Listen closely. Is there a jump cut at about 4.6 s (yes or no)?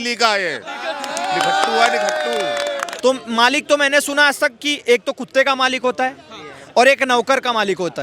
no